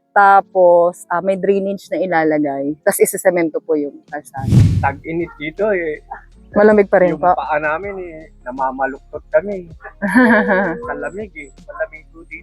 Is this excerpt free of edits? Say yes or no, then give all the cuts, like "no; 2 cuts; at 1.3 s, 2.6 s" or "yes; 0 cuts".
no; 2 cuts; at 4.3 s, 4.8 s